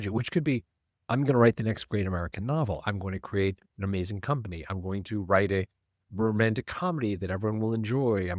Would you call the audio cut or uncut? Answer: cut